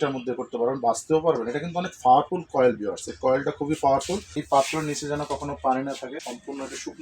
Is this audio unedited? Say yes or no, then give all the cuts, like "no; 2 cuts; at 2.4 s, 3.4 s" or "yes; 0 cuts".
no; 2 cuts; at 4.3 s, 6.2 s